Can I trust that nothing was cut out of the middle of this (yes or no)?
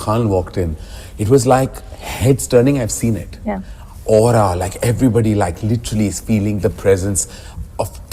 no